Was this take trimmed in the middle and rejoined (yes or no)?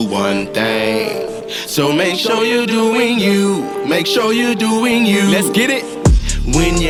no